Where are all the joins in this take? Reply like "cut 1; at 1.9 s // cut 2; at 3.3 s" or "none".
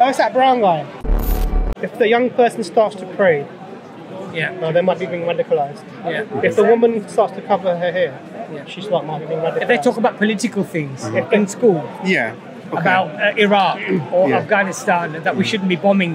cut 1; at 1.3 s

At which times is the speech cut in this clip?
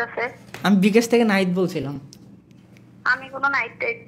none

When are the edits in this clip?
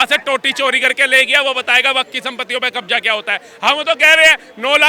none

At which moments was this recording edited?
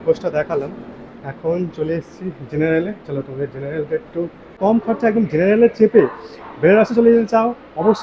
cut 1; at 4.6 s

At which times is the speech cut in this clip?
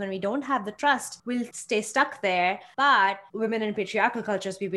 cut 1; at 1.4 s // cut 2; at 2.7 s // cut 3; at 3.3 s

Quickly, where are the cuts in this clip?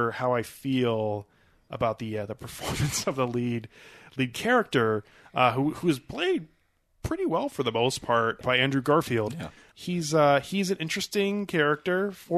cut 1; at 8.4 s // cut 2; at 9.7 s

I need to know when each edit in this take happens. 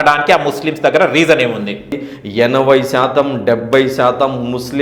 cut 1; at 2.0 s

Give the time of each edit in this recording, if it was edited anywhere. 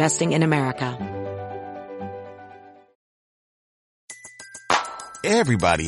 cut 1; at 0.9 s

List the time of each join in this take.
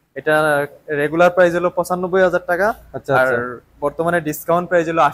none

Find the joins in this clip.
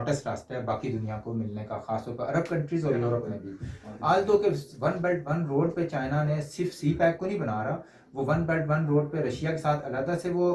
none

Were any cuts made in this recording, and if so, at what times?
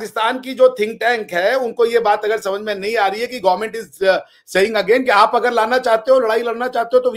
none

